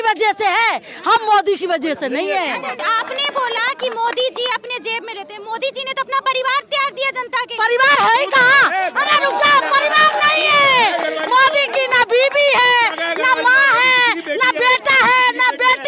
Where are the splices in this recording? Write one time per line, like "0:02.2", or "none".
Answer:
none